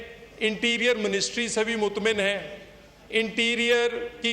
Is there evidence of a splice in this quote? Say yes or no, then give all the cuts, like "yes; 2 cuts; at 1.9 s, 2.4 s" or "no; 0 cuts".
no; 0 cuts